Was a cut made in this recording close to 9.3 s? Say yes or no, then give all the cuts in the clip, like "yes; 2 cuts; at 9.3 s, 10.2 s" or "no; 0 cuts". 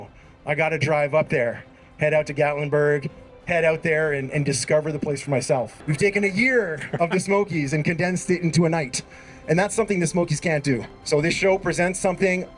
no; 2 cuts; at 5.8 s, 10.9 s